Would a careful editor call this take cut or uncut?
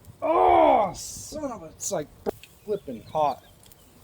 cut